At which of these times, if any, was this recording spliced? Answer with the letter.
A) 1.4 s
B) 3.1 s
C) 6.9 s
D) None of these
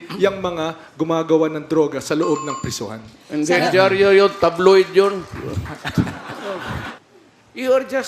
C